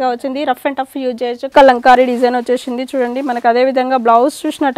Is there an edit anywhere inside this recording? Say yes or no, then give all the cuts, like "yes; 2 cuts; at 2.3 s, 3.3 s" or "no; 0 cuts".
yes; 1 cut; at 1.4 s